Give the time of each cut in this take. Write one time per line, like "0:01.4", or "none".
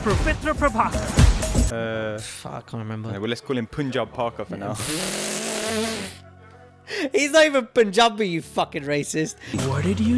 none